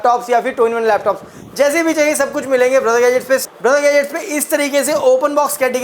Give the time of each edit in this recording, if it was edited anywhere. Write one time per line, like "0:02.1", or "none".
0:03.4